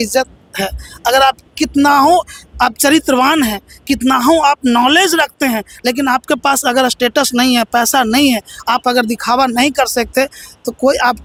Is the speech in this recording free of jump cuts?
yes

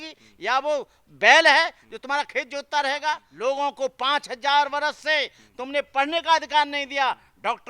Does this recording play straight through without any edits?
no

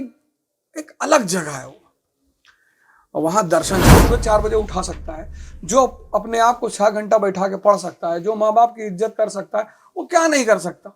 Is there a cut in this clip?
yes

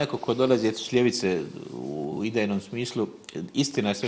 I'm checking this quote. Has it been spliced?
no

